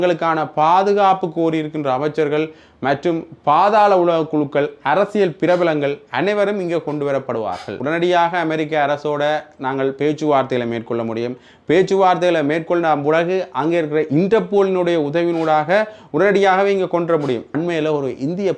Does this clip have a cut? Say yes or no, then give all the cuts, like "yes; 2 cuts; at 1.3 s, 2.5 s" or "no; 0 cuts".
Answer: yes; 2 cuts; at 7.7 s, 17.5 s